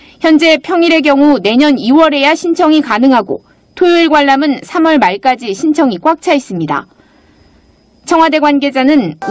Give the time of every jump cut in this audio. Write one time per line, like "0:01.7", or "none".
0:02.2